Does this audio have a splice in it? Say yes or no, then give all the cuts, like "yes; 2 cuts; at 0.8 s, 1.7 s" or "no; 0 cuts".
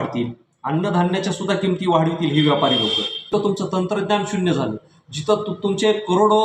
yes; 1 cut; at 3.3 s